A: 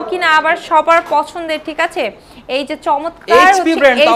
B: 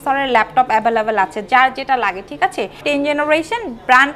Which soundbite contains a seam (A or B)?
B